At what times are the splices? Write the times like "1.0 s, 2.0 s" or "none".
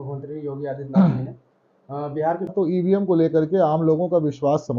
2.5 s